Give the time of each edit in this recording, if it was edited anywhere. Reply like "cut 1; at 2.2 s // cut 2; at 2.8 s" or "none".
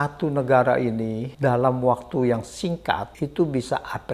cut 1; at 1.2 s // cut 2; at 3.1 s